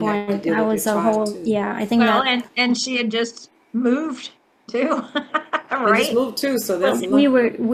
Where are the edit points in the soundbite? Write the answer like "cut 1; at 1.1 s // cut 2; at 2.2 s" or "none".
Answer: none